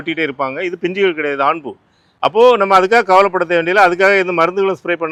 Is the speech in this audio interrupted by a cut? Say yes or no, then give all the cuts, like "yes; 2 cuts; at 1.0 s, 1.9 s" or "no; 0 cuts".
no; 0 cuts